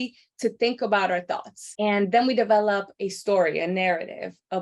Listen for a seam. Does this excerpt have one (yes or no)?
yes